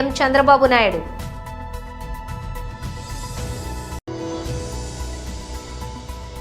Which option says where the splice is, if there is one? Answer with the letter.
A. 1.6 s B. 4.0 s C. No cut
C